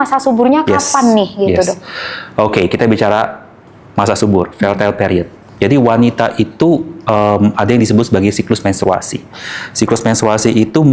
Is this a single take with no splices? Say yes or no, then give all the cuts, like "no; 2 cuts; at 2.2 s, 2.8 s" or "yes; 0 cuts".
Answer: yes; 0 cuts